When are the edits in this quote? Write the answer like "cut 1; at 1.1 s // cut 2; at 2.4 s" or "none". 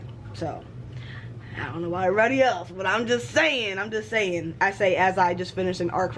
none